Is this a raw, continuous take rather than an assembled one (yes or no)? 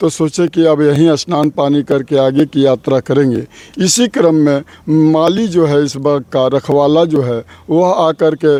yes